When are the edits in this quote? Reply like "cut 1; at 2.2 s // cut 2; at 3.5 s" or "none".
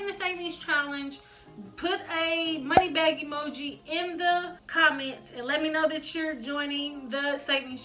cut 1; at 4.6 s